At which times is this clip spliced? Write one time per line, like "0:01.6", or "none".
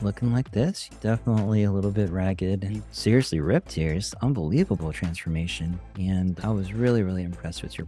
0:00.9
0:02.9